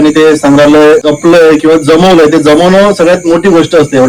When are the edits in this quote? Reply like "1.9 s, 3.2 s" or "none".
1.0 s